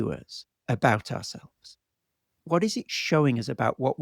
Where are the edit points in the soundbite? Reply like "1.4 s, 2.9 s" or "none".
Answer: none